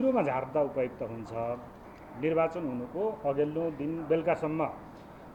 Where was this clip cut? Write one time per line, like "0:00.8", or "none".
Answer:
none